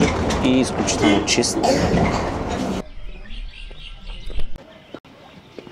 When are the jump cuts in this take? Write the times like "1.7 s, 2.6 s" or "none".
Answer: 2.8 s